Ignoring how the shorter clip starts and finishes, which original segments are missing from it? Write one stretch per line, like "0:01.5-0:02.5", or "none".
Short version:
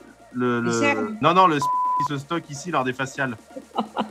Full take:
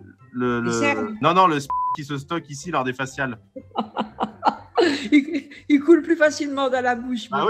none